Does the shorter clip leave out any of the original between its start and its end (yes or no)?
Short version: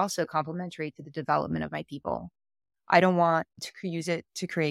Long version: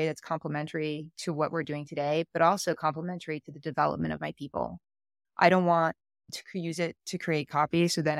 yes